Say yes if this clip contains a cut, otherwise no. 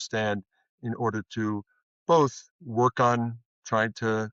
no